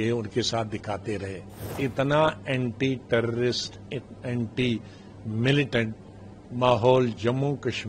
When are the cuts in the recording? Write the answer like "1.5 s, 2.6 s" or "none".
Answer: 1.7 s